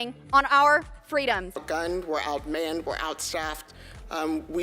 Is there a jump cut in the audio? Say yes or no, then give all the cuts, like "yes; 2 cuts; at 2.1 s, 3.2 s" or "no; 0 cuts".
yes; 1 cut; at 1.5 s